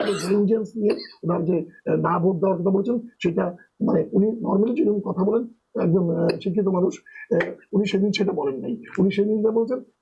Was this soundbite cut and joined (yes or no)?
no